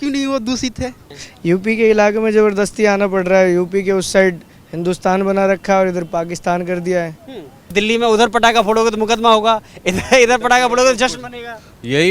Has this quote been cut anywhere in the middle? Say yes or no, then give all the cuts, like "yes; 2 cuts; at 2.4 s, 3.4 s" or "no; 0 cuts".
yes; 2 cuts; at 1.0 s, 7.7 s